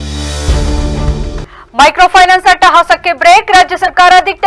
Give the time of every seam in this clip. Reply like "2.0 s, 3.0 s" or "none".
1.3 s